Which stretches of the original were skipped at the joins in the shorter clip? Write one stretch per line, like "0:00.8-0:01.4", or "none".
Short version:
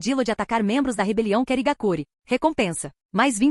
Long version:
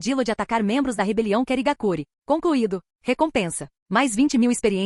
0:02.1-0:02.9